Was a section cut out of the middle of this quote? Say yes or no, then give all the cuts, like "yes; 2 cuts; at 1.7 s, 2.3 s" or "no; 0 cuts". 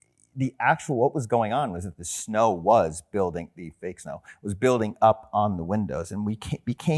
no; 0 cuts